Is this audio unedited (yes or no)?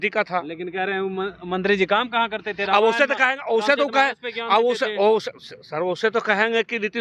yes